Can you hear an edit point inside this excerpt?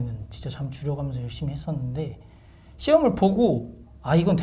no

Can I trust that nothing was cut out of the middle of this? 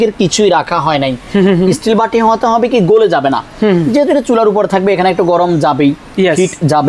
yes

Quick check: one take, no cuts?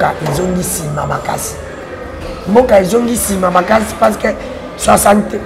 yes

